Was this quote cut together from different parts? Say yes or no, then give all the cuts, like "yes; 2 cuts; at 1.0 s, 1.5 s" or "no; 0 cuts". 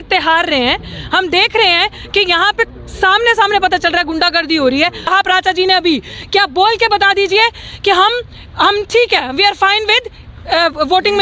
yes; 1 cut; at 5.1 s